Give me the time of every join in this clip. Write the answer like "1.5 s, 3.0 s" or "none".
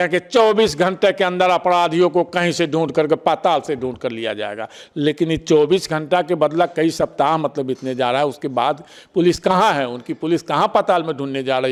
none